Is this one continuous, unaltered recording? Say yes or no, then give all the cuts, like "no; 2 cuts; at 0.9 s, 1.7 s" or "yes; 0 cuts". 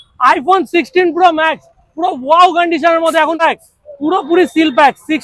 no; 1 cut; at 3.4 s